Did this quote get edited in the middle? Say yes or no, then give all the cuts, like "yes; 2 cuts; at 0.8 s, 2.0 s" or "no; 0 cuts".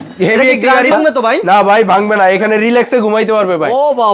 yes; 1 cut; at 0.9 s